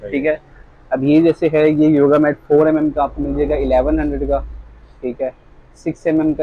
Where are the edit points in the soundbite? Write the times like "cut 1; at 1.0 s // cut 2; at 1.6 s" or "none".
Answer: none